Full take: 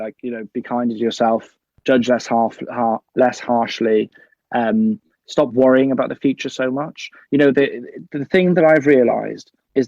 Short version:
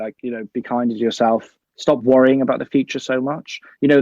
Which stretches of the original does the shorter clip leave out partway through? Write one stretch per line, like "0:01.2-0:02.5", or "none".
0:01.6-0:05.1